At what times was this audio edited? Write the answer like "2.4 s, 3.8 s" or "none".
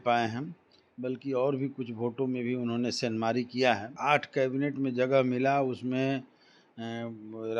3.9 s